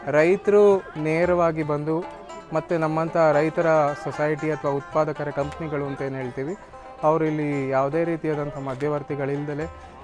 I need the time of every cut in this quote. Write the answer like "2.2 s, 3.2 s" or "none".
none